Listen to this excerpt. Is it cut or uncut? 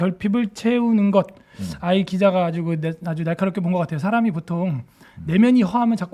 uncut